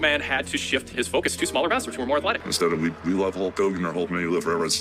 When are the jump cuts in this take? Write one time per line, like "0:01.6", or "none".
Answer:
0:02.5